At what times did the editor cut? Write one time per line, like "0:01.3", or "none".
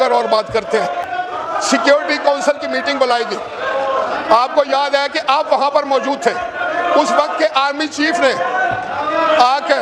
none